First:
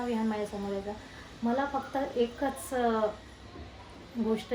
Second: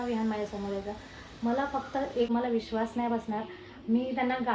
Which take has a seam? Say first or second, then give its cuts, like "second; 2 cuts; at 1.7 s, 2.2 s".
second; 1 cut; at 2.3 s